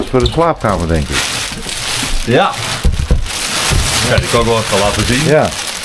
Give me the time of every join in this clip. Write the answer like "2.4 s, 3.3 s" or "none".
none

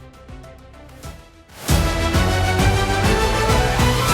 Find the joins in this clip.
1.5 s

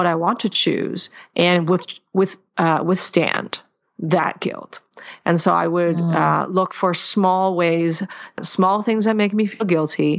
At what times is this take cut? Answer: 8.4 s

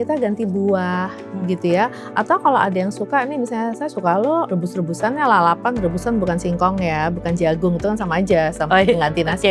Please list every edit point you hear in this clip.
4.5 s

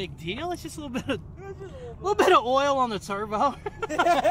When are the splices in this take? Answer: none

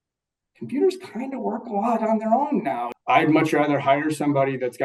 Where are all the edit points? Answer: 2.9 s

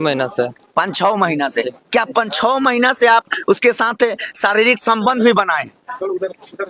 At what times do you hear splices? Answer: none

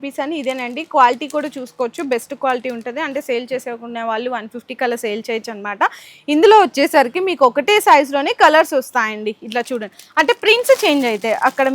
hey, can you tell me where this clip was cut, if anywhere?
none

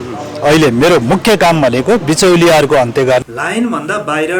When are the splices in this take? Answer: 3.2 s

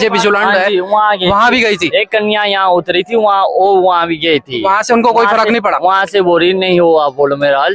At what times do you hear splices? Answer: none

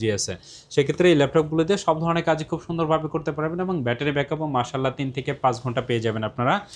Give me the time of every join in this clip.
none

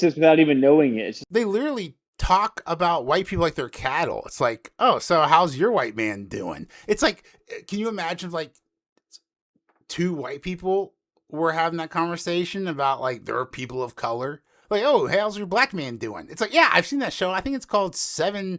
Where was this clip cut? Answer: 1.2 s

